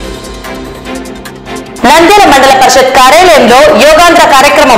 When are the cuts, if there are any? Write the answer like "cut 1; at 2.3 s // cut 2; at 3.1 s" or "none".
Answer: cut 1; at 1.5 s